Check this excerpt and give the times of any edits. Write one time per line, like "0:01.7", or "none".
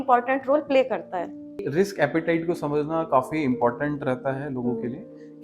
0:01.7